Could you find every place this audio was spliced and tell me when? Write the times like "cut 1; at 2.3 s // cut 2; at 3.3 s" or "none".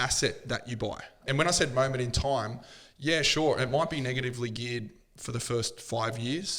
cut 1; at 1.2 s